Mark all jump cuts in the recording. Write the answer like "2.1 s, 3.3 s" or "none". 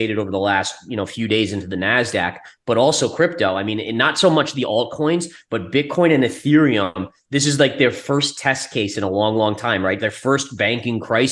none